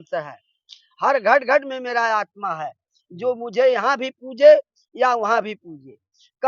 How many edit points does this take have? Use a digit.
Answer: 0